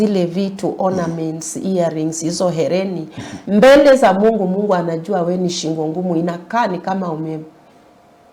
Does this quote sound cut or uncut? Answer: uncut